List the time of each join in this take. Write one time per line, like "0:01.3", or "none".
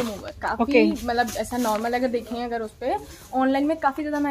none